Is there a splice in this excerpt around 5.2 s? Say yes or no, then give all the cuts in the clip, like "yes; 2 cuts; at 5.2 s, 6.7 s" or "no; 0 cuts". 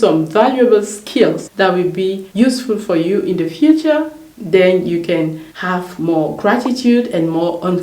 no; 0 cuts